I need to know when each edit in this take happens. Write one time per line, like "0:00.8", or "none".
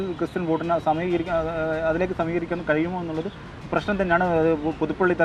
none